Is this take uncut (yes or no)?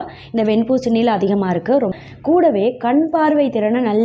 no